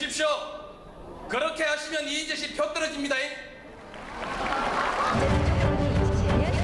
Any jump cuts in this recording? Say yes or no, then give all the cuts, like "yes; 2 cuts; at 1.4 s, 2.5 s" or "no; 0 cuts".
no; 0 cuts